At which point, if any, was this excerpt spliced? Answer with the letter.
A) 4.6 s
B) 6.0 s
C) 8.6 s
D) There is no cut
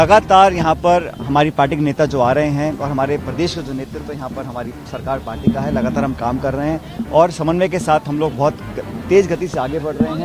D